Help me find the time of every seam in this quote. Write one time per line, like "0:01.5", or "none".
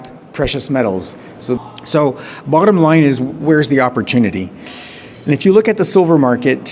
0:01.6

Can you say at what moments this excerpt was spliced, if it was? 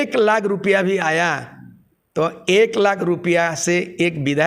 none

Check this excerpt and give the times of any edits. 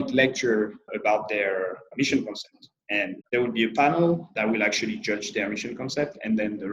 0:00.9
0:01.9
0:03.2
0:04.3

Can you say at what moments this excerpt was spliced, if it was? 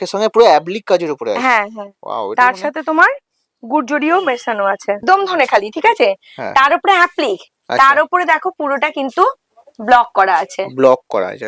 0:05.0

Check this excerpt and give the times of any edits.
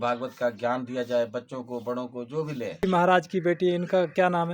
0:02.8

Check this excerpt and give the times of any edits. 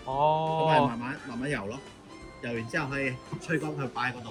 none

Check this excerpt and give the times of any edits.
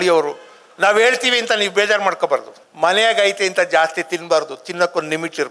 0:02.6

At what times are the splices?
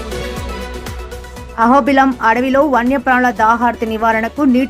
0:01.5

